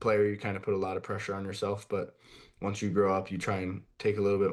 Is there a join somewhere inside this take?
no; 0 cuts

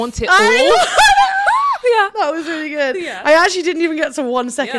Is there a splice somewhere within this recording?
no; 0 cuts

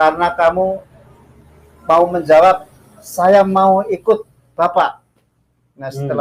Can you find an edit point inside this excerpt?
no; 0 cuts

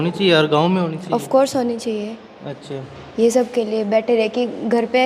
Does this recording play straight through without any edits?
yes; 0 cuts

